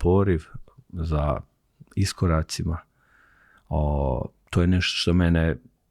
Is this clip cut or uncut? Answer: uncut